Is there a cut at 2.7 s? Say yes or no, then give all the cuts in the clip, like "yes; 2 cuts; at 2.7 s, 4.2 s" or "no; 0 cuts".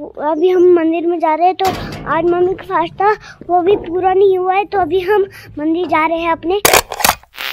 no; 1 cut; at 6.6 s